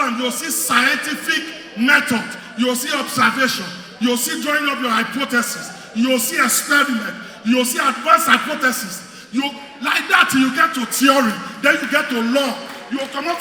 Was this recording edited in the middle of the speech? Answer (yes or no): no